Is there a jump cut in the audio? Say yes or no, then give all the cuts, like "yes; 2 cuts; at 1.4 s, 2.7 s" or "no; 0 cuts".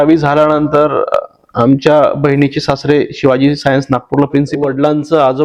yes; 1 cut; at 4.5 s